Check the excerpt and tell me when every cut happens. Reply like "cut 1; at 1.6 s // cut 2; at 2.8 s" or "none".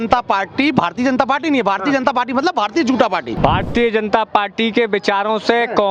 cut 1; at 3.3 s